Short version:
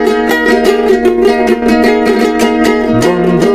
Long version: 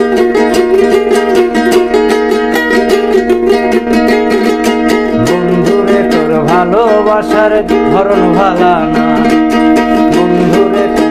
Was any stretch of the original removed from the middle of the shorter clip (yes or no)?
no